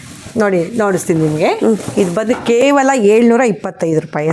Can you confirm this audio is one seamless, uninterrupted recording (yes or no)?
yes